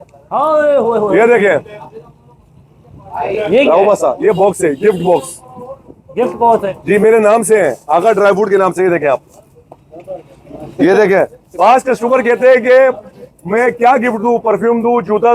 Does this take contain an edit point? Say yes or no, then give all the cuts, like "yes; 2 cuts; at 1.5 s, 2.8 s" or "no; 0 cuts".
no; 0 cuts